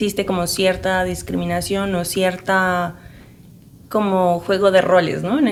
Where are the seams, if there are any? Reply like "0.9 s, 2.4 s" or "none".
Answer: none